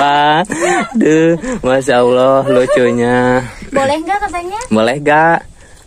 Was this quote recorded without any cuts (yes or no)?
yes